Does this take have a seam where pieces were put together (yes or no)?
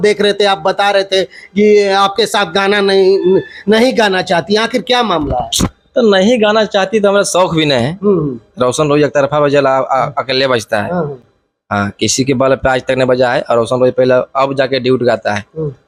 no